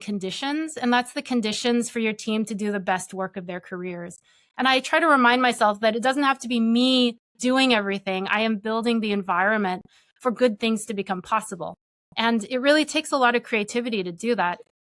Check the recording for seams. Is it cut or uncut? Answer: uncut